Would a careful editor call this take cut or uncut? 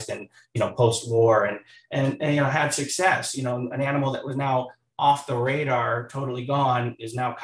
uncut